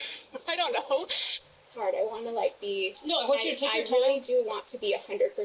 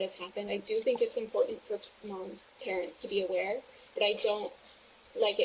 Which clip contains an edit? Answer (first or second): first